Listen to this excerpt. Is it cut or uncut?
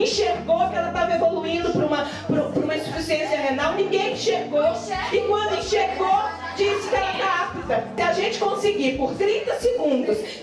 cut